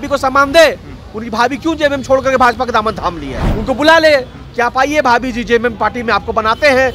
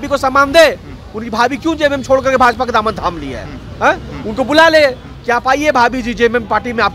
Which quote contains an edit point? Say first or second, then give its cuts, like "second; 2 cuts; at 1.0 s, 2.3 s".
first; 1 cut; at 3.5 s